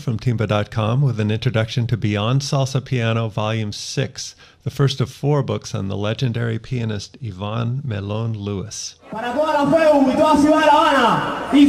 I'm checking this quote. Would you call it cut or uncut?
uncut